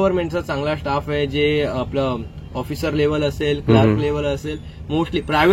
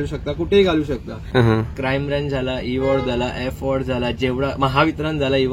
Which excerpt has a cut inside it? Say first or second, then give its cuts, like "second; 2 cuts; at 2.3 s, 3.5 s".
second; 1 cut; at 1.3 s